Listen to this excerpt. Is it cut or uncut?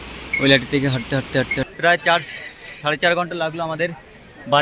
cut